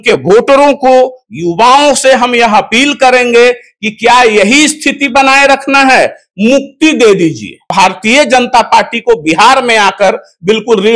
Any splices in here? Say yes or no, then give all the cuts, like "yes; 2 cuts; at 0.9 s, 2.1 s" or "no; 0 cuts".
yes; 1 cut; at 7.7 s